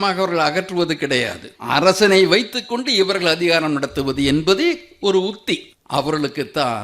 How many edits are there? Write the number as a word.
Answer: two